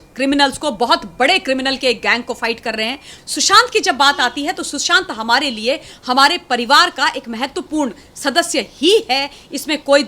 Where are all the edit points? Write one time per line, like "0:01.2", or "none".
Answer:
0:03.1